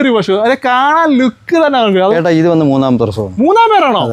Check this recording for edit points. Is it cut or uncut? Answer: cut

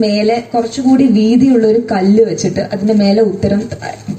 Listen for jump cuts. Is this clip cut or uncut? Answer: uncut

